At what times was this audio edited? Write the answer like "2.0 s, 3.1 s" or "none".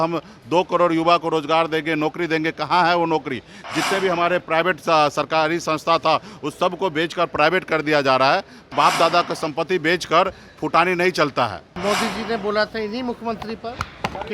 8.7 s, 11.7 s